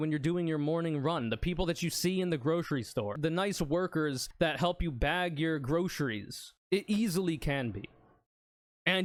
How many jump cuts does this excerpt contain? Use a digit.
0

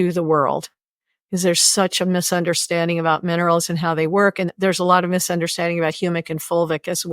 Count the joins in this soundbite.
1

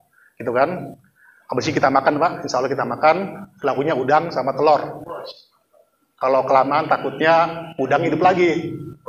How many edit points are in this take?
0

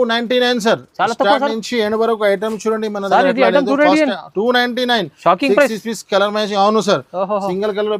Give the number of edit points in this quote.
0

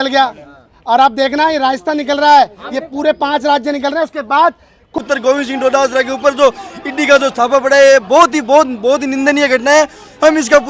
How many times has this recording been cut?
1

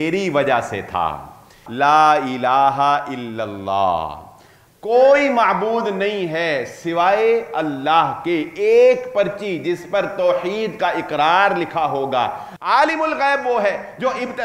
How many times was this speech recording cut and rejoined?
2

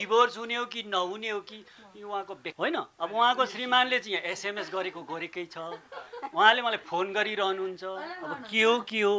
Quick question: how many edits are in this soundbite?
1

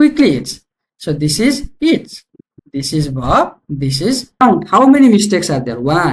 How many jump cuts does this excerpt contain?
1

